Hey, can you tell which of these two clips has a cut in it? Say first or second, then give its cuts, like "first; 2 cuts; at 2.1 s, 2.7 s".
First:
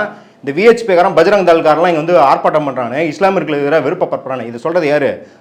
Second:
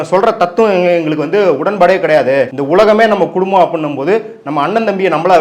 second; 1 cut; at 2.6 s